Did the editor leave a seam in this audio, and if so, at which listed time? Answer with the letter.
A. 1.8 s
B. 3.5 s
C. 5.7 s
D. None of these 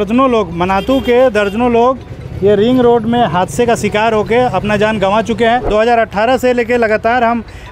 C